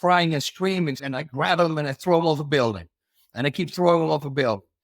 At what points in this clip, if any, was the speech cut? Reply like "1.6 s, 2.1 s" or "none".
1.1 s